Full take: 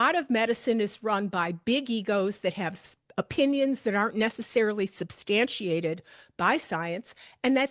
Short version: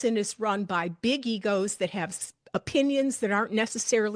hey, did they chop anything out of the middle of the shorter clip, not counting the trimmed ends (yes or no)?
no